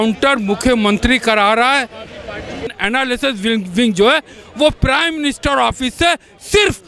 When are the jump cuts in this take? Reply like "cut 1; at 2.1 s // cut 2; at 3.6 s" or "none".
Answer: cut 1; at 2.7 s